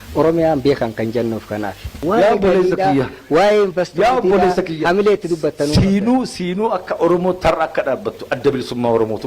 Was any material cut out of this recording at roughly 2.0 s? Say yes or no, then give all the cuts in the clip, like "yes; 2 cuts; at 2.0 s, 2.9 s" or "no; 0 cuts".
yes; 1 cut; at 2.0 s